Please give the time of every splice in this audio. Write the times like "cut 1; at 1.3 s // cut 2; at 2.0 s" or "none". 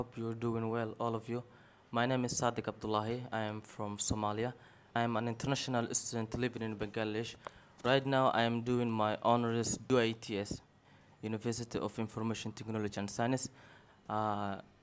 cut 1; at 5.0 s // cut 2; at 9.8 s